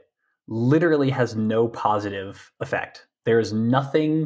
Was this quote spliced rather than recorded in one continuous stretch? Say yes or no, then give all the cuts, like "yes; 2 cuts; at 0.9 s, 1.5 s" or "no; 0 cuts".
no; 0 cuts